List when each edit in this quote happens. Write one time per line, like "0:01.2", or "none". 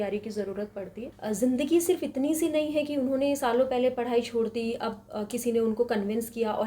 0:01.1